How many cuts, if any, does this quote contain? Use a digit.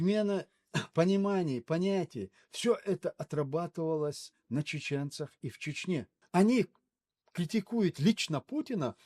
1